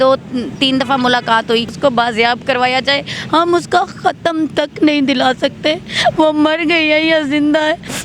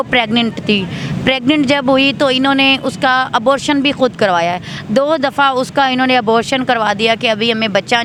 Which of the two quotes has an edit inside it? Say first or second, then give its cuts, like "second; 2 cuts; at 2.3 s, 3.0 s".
first; 1 cut; at 1.7 s